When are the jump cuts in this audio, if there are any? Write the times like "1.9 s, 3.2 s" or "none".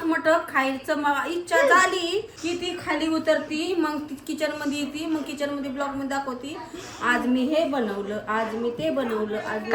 2.3 s